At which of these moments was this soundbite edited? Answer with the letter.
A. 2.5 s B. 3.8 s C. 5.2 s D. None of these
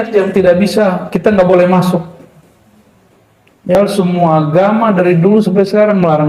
B